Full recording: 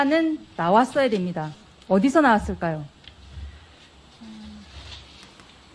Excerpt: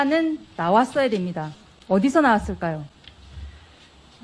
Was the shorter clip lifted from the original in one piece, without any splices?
yes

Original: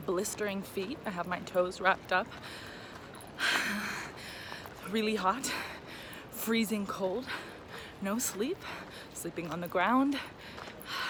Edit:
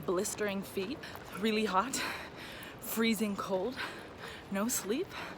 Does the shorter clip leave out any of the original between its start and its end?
yes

